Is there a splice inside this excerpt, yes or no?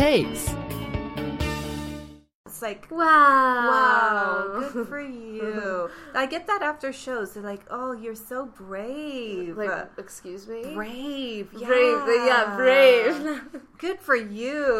yes